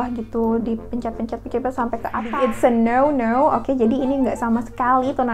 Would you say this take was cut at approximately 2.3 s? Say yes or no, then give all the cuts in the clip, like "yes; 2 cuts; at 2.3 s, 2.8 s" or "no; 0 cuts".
yes; 1 cut; at 2.3 s